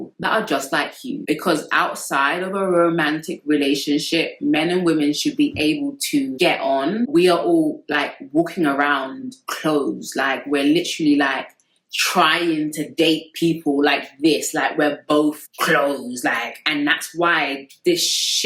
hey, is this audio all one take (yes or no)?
no